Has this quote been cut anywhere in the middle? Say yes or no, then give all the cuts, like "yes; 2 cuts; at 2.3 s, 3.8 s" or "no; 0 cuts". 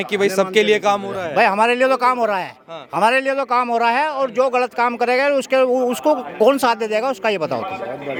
no; 0 cuts